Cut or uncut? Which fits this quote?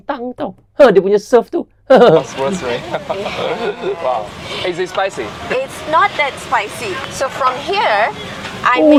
uncut